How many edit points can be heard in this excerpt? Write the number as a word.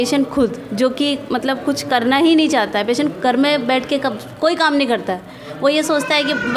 zero